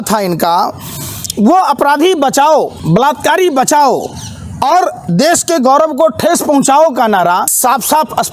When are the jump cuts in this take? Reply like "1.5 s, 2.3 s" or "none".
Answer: 2.8 s, 7.5 s

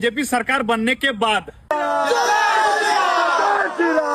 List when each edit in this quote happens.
none

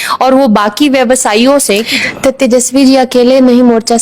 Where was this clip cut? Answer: 1.9 s

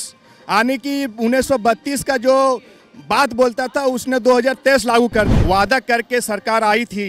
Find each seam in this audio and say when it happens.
5.3 s

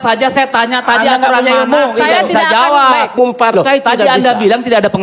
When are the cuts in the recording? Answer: 3.1 s

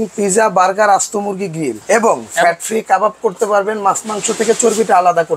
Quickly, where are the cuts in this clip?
1.8 s

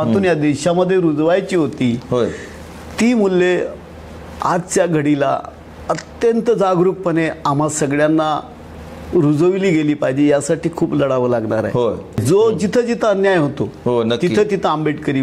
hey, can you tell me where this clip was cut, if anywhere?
12.2 s

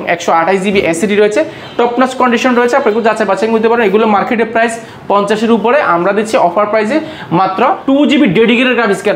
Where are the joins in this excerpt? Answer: 7.8 s

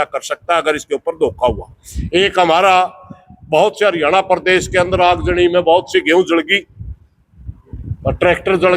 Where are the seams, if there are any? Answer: none

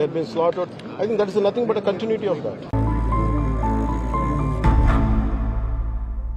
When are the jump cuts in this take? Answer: none

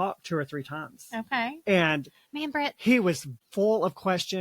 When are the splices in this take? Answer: 3.4 s

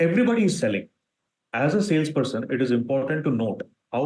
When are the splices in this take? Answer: none

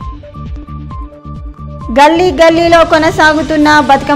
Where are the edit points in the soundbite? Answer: 1.1 s

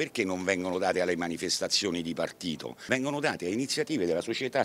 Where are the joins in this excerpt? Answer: 2.7 s

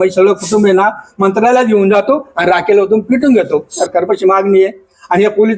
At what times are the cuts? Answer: 3.7 s

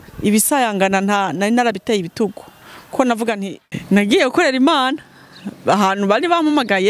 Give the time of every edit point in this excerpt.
3.6 s

